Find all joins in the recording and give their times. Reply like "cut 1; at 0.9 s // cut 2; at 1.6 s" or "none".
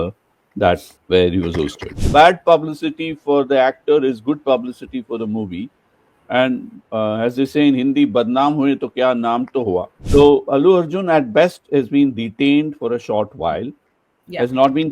cut 1; at 0.9 s // cut 2; at 2.0 s // cut 3; at 10.0 s